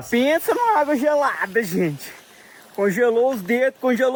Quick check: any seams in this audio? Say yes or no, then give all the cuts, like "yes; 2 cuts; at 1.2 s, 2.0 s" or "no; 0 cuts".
no; 0 cuts